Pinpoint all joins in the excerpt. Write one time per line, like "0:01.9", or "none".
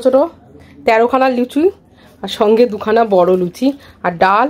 none